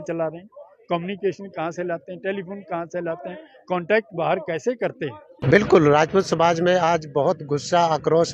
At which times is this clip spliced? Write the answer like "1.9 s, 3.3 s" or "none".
5.4 s